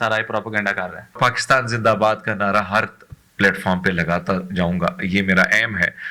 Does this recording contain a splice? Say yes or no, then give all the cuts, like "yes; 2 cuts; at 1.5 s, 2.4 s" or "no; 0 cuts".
yes; 1 cut; at 1.1 s